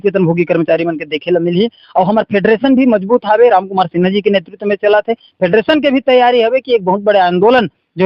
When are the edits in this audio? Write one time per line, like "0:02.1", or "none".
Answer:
none